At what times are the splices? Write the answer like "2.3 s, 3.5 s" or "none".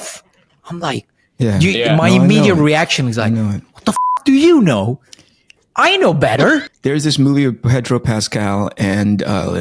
6.7 s